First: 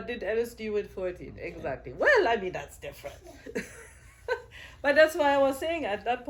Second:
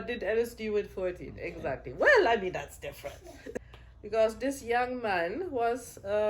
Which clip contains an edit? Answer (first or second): second